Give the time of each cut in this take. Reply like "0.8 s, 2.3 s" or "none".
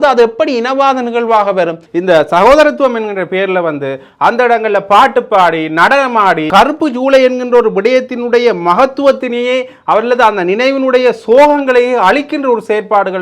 1.9 s, 6.5 s